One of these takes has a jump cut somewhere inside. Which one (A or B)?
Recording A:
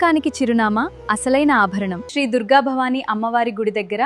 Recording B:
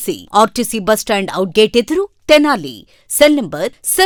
A